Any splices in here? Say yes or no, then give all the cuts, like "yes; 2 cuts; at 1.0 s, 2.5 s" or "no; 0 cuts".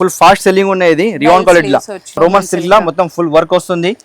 yes; 1 cut; at 2.0 s